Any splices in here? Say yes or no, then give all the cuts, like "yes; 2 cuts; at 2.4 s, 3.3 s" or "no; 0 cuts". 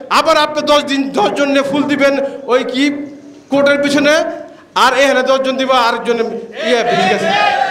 no; 0 cuts